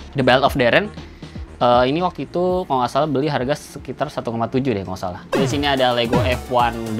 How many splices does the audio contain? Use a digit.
1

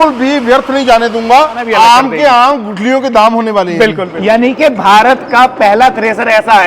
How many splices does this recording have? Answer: 2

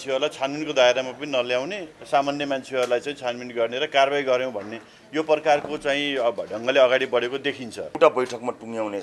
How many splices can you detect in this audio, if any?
1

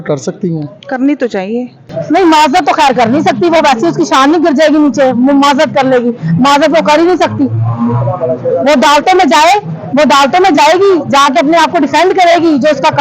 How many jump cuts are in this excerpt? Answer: 1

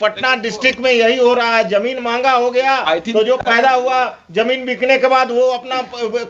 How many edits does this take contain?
0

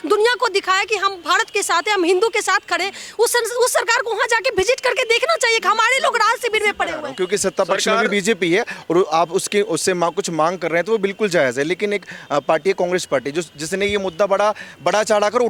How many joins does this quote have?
0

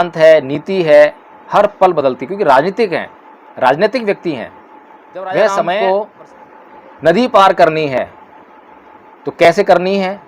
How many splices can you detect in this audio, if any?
1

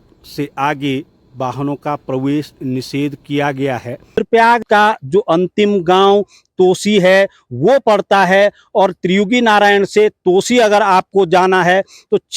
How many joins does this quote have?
1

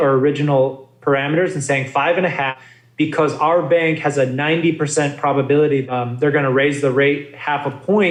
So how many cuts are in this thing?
0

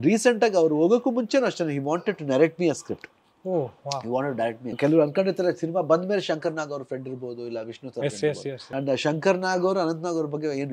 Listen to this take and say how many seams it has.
2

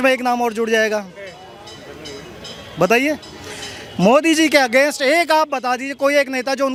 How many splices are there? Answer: 0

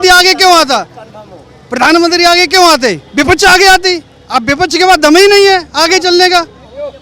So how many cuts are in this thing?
0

